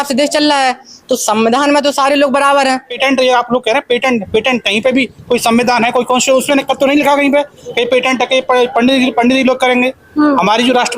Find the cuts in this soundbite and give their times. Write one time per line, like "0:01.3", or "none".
0:02.9